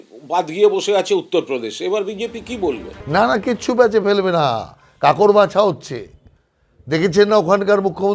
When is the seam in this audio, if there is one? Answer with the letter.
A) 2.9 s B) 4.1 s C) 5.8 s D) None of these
A